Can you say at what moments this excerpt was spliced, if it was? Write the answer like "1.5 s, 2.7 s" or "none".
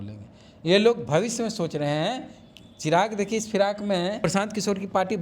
4.2 s